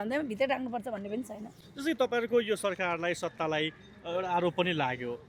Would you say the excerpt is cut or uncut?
uncut